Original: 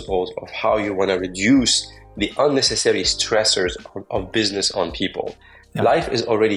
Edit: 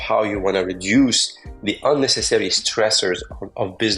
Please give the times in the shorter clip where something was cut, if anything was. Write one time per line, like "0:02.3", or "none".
none